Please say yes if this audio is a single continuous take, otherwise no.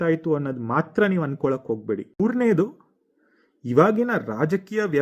no